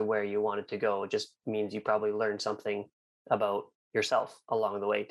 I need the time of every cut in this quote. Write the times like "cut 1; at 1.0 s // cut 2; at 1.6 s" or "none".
none